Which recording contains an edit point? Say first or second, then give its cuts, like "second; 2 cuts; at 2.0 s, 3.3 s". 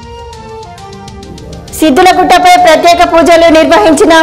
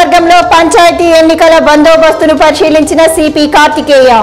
first; 1 cut; at 0.9 s